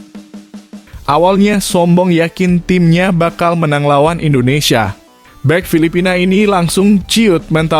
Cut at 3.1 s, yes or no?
no